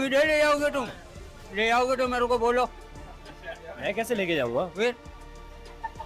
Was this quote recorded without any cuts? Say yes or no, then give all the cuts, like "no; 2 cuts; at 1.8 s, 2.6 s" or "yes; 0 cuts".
yes; 0 cuts